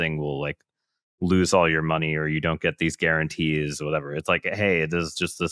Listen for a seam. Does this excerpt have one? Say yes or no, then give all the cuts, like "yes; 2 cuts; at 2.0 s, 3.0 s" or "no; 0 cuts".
no; 0 cuts